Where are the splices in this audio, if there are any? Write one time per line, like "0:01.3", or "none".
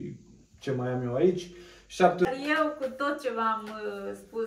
0:02.3